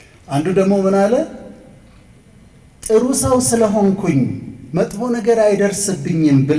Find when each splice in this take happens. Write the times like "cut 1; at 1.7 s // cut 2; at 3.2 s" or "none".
none